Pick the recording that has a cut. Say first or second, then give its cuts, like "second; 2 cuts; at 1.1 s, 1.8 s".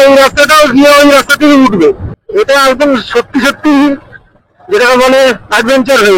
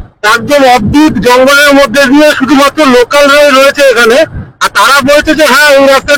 first; 1 cut; at 2.1 s